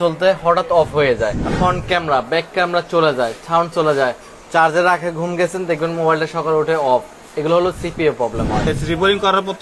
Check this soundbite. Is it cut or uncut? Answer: cut